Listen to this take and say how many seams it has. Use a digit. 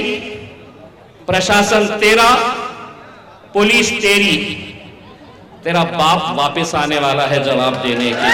0